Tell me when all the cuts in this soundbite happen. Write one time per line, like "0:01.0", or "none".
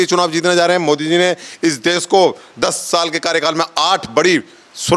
none